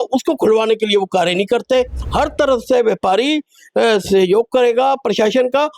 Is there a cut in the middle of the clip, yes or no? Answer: yes